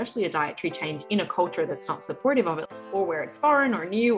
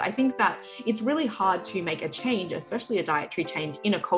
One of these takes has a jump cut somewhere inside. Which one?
first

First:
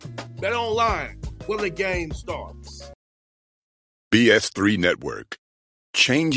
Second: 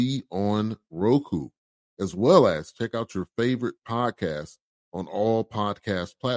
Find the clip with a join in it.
first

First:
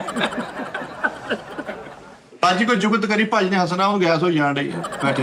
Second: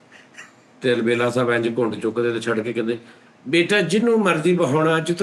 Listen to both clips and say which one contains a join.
first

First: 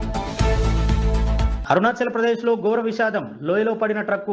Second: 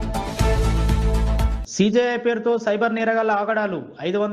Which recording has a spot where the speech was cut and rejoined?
second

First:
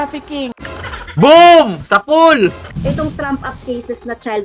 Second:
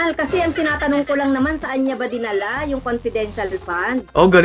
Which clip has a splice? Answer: first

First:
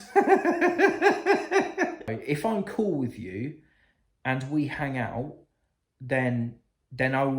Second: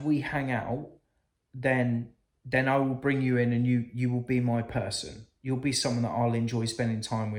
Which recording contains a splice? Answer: first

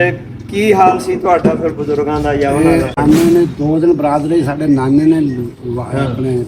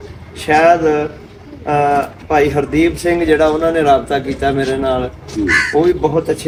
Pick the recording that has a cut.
first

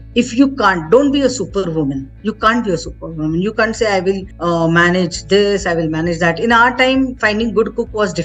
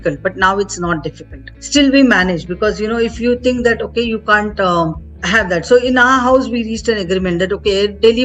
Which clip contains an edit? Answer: second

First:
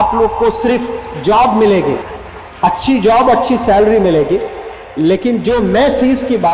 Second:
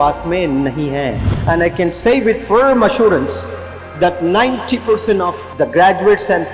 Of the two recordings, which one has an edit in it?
second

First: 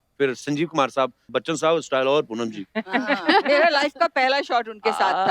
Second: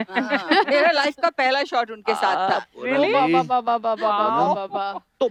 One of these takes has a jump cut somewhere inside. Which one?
first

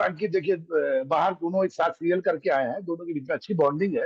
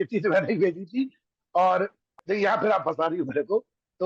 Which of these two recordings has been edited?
second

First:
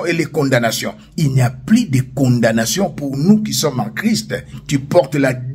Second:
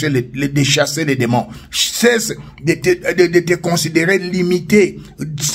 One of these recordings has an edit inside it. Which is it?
first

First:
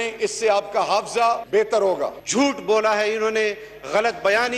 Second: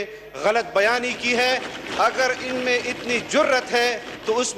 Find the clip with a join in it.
first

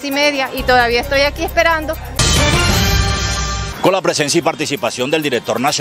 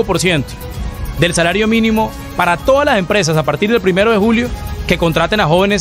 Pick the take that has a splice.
first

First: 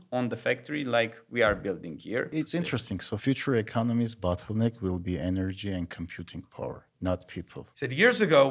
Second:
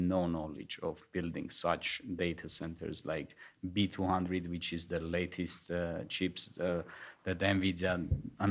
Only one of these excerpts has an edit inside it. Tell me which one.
first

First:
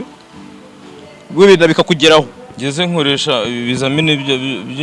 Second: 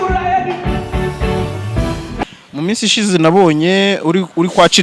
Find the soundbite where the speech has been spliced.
second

